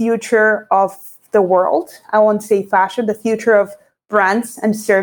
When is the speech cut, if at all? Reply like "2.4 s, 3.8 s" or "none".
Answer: none